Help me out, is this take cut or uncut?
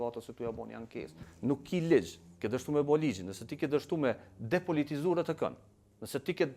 cut